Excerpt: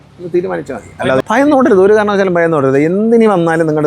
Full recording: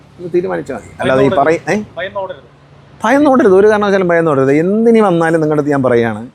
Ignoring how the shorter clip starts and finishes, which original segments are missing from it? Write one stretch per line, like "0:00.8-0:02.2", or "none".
0:01.2-0:02.9